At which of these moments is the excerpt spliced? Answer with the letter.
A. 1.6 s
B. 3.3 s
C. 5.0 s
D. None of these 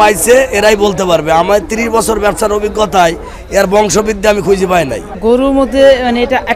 C